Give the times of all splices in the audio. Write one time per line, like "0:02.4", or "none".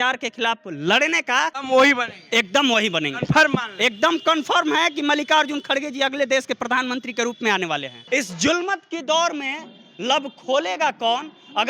0:01.6
0:07.9